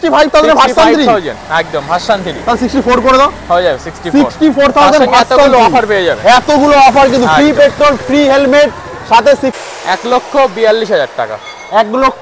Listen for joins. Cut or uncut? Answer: cut